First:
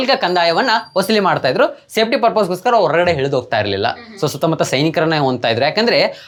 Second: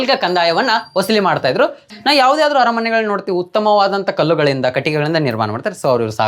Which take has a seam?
second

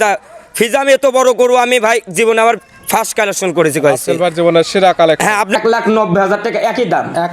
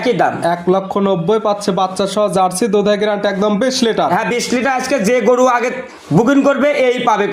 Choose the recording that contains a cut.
first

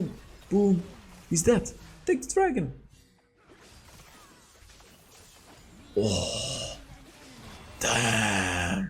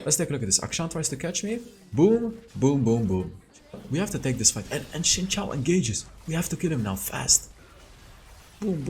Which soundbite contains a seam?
second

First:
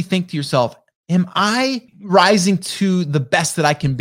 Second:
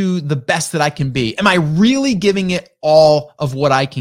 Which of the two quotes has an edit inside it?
first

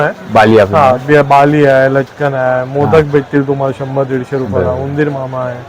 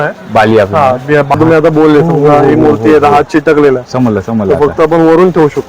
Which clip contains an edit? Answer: second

